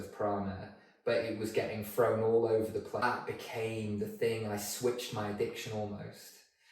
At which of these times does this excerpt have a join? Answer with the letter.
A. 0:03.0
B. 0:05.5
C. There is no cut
A